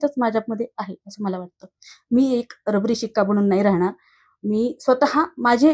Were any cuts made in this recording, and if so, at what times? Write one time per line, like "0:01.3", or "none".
none